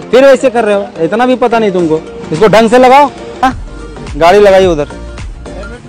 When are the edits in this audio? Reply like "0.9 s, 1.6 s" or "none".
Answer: 3.4 s